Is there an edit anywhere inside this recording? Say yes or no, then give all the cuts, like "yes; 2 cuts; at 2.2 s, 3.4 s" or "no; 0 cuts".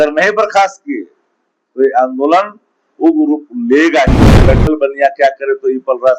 yes; 1 cut; at 4.3 s